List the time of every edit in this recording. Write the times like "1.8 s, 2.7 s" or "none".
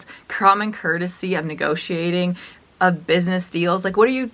none